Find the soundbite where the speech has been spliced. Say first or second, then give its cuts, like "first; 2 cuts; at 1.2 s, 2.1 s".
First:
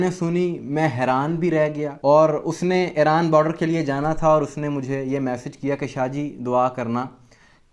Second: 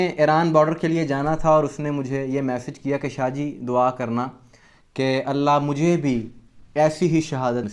first; 1 cut; at 1.9 s